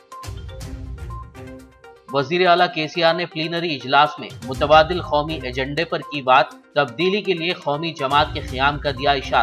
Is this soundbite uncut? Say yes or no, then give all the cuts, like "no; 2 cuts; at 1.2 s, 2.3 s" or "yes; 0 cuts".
no; 1 cut; at 1.0 s